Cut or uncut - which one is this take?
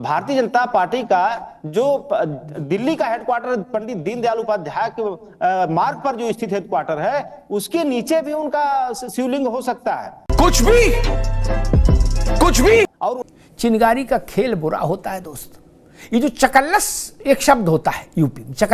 cut